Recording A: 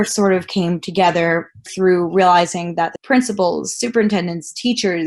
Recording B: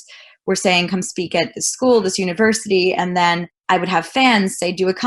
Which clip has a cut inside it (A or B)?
A